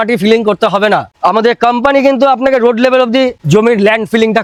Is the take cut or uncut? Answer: uncut